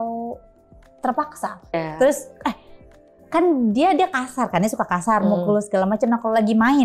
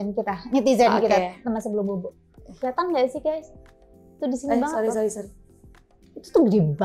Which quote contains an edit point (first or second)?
first